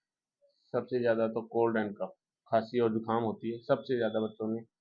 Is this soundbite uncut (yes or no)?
yes